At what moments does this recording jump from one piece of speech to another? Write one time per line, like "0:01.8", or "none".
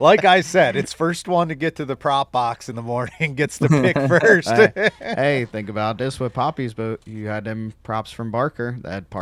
none

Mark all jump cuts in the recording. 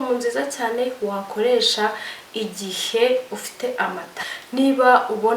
0:04.1

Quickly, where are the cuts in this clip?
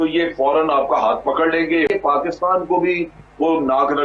0:01.9

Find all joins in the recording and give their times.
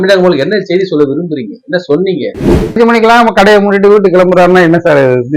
0:02.7

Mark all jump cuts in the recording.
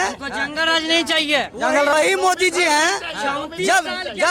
0:01.9

